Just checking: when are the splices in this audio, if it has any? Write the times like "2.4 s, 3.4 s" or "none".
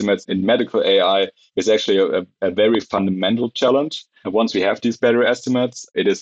none